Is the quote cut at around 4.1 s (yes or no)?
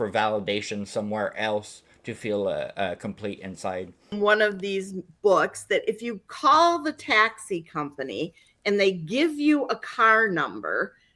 yes